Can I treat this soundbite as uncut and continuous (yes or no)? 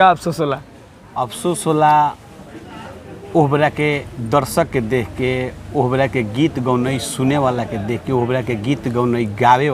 yes